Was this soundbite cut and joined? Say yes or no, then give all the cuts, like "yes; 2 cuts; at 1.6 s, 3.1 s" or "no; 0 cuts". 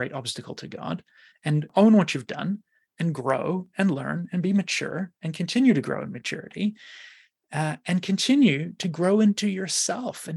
yes; 1 cut; at 1.7 s